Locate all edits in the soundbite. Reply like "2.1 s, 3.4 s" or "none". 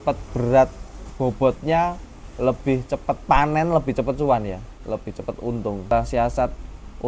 5.9 s